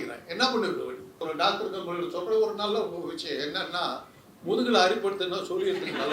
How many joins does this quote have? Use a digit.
1